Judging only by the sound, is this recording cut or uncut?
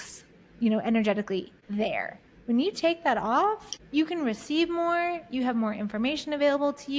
cut